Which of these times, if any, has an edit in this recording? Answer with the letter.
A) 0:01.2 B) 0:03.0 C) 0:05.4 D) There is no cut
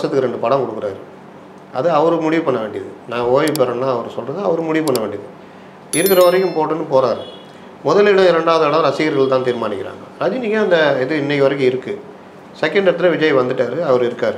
D